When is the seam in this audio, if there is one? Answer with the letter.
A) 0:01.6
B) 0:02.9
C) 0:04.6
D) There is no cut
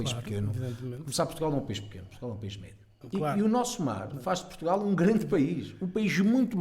B